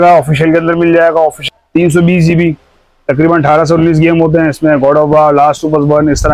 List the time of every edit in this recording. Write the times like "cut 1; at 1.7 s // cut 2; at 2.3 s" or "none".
cut 1; at 1.4 s